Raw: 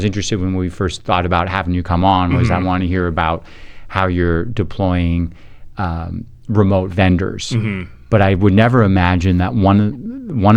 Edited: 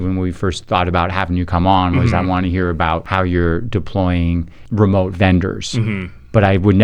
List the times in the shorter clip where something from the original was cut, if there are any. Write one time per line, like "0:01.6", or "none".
0:03.1
0:04.6